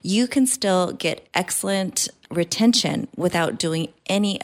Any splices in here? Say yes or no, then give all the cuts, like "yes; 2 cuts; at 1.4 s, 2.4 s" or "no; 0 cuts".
no; 0 cuts